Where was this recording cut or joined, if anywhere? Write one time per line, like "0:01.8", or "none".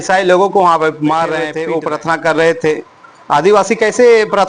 0:01.6